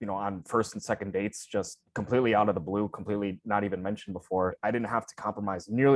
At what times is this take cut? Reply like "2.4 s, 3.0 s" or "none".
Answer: 4.6 s